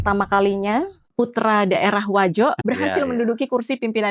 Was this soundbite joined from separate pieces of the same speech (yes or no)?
yes